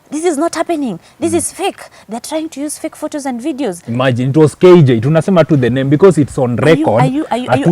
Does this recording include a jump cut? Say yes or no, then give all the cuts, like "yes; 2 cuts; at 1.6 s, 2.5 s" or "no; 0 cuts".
no; 0 cuts